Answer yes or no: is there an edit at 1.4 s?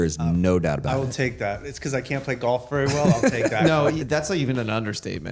no